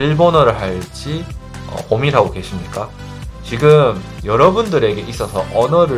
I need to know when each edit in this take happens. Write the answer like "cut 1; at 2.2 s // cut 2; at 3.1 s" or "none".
none